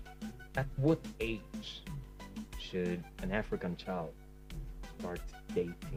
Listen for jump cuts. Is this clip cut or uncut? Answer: uncut